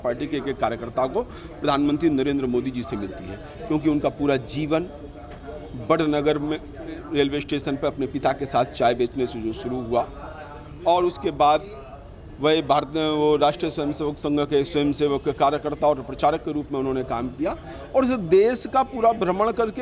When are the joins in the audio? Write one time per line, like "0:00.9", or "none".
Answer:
none